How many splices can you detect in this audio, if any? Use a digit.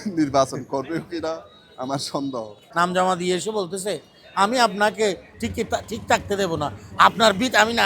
2